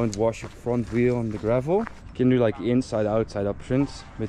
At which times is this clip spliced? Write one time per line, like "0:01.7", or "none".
0:02.0